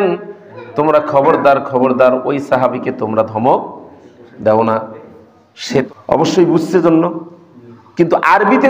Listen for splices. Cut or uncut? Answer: cut